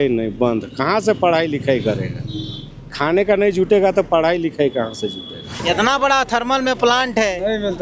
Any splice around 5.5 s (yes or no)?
yes